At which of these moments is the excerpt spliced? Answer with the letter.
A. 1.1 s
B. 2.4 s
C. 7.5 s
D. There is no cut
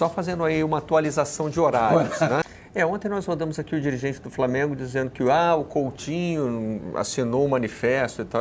B